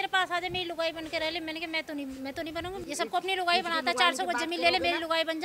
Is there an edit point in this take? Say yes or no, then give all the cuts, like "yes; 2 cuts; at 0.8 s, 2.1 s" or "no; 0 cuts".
yes; 1 cut; at 2.8 s